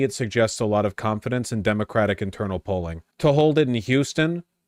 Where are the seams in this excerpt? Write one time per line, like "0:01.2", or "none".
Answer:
0:03.0